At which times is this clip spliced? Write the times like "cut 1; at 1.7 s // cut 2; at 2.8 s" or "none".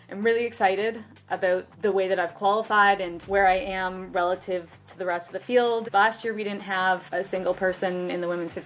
cut 1; at 1.7 s // cut 2; at 3.1 s // cut 3; at 5.9 s // cut 4; at 7.1 s